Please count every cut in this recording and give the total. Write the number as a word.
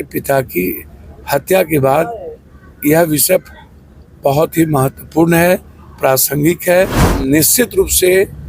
one